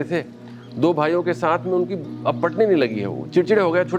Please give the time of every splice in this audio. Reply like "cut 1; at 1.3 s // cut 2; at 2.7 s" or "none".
none